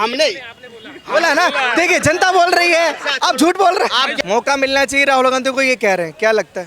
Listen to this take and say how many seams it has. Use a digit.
1